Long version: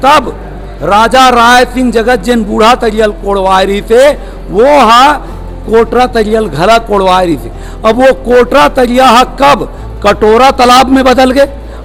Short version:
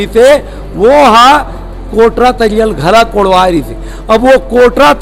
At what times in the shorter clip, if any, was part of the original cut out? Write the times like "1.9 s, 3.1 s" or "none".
none